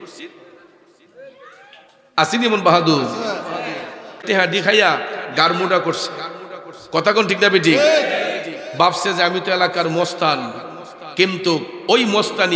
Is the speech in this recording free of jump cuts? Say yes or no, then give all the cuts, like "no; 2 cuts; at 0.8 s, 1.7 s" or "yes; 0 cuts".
no; 1 cut; at 4.2 s